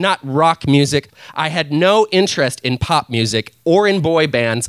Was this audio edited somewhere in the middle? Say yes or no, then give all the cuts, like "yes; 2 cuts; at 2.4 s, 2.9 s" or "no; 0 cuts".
yes; 1 cut; at 1.1 s